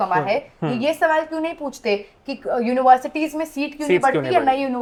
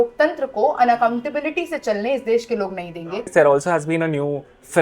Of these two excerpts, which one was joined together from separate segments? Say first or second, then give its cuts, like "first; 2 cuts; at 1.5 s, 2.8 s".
second; 1 cut; at 3.3 s